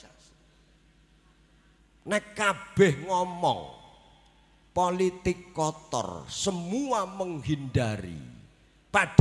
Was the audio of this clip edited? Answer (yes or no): yes